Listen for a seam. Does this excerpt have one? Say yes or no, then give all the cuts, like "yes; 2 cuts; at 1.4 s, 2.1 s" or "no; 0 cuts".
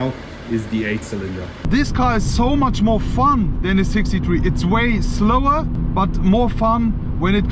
yes; 2 cuts; at 1.7 s, 5.8 s